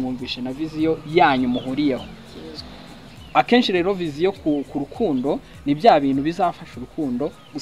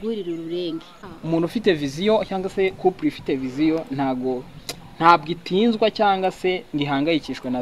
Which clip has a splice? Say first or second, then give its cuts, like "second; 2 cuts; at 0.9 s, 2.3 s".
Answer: second; 1 cut; at 0.9 s